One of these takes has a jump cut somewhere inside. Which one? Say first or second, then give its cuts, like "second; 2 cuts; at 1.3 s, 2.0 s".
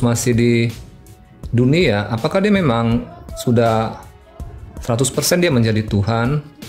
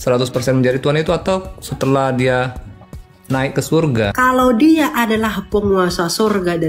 second; 1 cut; at 4.1 s